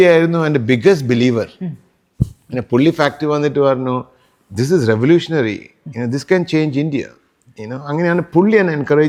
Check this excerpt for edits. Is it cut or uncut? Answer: uncut